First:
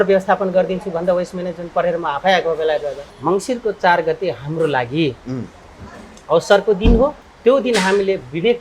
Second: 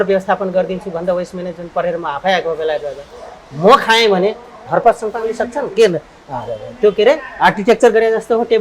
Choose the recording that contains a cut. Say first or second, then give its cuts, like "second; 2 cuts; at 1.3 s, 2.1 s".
first; 2 cuts; at 3.0 s, 7.3 s